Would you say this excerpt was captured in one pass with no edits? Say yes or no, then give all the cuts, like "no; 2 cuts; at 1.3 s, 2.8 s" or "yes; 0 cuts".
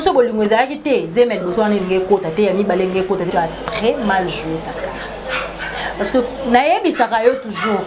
no; 1 cut; at 3.3 s